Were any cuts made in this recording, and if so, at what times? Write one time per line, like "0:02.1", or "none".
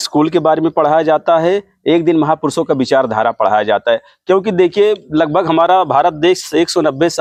none